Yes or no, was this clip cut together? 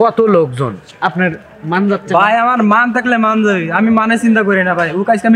no